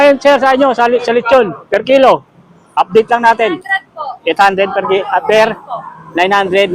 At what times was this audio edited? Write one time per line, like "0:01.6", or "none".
none

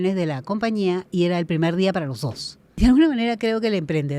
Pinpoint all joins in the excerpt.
0:02.7

